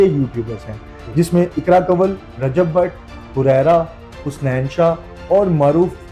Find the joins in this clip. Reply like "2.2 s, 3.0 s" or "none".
none